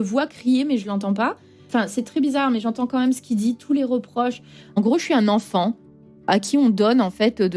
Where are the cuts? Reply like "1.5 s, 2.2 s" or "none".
1.6 s, 4.7 s, 6.3 s